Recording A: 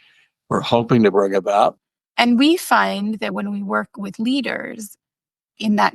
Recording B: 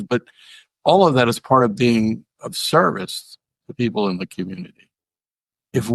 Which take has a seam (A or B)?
A